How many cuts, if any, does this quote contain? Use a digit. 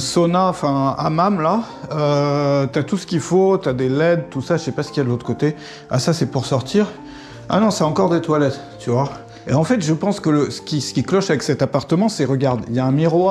0